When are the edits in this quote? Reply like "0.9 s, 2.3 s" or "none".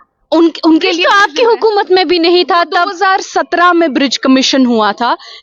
none